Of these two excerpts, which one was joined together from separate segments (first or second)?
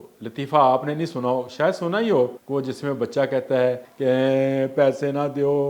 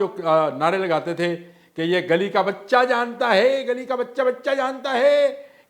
first